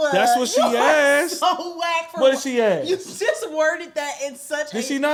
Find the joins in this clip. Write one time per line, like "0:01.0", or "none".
none